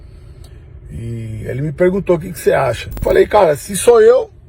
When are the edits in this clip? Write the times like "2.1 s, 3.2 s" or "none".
2.9 s